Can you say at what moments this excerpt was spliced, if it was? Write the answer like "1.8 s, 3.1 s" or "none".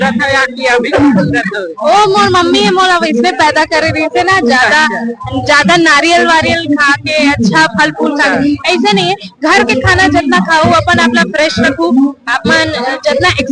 none